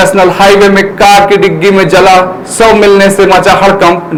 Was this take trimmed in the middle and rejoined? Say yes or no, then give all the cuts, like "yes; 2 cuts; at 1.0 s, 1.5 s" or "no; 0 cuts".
no; 0 cuts